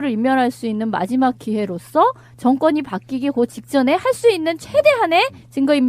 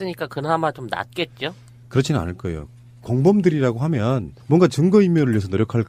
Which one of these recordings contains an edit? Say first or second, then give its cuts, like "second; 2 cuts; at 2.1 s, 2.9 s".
first; 1 cut; at 3.1 s